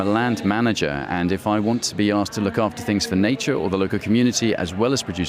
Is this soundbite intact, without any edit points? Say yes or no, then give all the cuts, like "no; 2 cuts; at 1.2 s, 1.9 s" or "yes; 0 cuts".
yes; 0 cuts